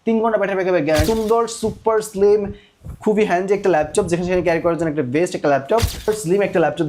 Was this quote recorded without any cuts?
no; 2 cuts; at 1.0 s, 6.1 s

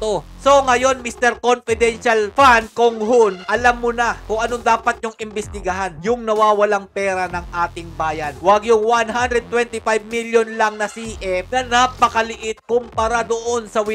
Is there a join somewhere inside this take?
no; 0 cuts

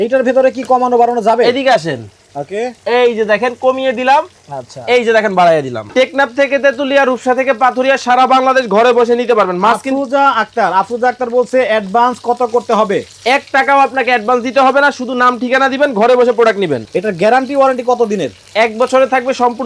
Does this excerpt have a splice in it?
yes; 2 cuts; at 5.8 s, 16.9 s

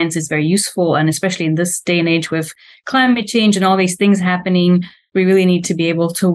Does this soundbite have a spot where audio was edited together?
no; 0 cuts

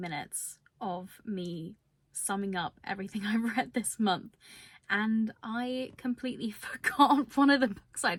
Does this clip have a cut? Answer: no; 0 cuts

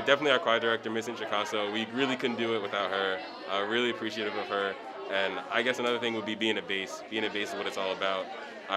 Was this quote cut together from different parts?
no; 0 cuts

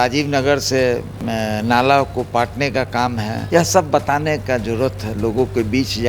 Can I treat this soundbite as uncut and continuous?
no; 2 cuts; at 1.1 s, 3.4 s

